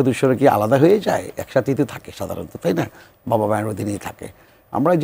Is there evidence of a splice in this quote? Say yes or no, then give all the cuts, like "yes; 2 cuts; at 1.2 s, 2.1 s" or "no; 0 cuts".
no; 0 cuts